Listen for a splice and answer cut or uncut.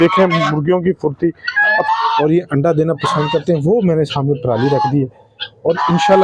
cut